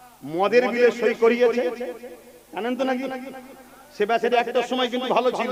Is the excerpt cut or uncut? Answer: uncut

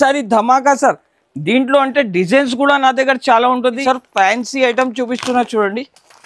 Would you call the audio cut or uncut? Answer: cut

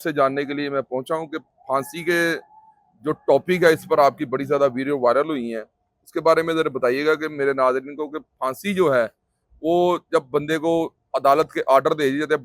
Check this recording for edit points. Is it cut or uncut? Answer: uncut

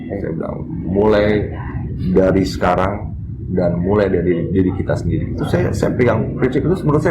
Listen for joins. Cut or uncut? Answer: uncut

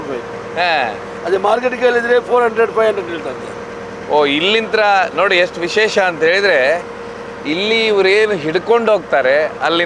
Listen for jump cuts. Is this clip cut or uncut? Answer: uncut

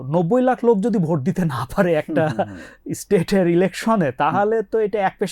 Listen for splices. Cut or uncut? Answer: uncut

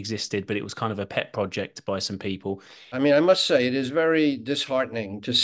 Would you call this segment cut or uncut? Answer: cut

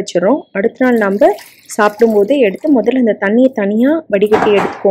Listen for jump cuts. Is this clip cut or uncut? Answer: uncut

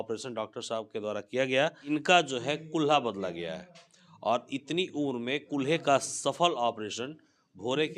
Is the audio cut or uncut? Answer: cut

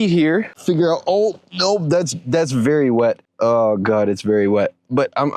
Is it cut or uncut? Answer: uncut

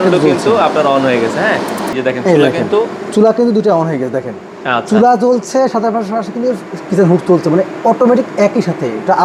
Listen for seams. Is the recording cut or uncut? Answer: uncut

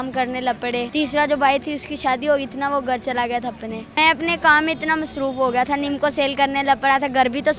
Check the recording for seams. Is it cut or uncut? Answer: cut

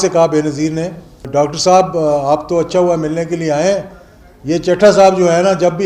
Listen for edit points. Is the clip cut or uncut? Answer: cut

